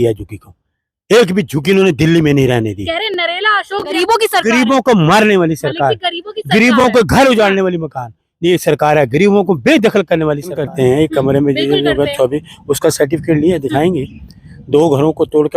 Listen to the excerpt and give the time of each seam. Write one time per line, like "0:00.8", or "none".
0:03.9
0:10.7